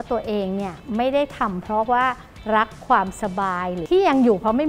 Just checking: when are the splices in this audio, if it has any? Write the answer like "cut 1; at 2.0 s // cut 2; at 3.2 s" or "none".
cut 1; at 3.7 s